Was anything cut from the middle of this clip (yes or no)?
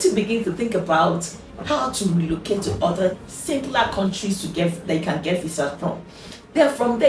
no